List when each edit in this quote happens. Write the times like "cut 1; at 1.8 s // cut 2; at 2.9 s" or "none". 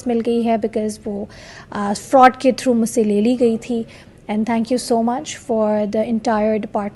none